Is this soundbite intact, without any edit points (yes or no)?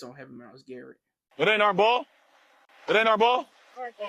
no